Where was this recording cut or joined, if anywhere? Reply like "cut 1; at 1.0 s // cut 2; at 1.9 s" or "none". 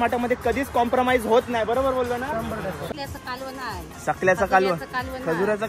cut 1; at 2.9 s